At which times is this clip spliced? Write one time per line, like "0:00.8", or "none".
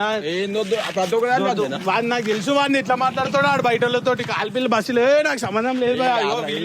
none